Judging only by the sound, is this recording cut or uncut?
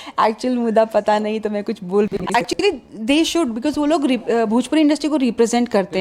cut